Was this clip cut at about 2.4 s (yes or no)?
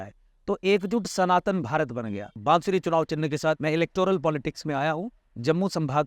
yes